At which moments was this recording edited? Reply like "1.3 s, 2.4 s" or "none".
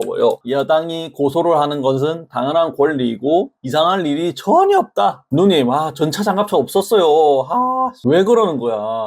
5.2 s